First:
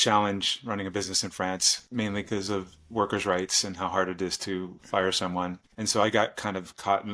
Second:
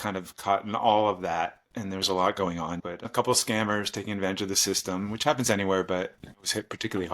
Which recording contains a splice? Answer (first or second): second